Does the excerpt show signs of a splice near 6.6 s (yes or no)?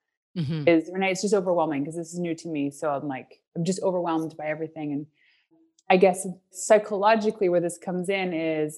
yes